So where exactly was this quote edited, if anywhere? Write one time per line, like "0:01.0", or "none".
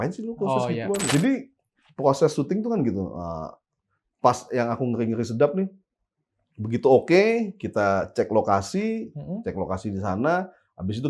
0:01.0